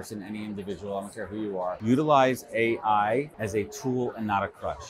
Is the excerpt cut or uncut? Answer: cut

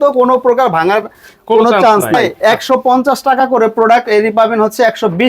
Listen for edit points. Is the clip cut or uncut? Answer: cut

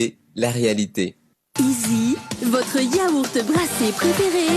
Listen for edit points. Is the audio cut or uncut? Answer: cut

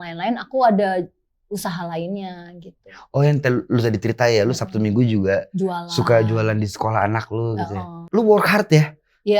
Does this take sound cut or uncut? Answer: cut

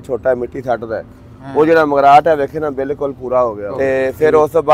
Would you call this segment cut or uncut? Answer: cut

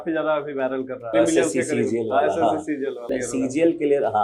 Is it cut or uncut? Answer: cut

